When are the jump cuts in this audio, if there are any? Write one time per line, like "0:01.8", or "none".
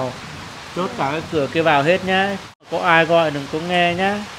0:02.7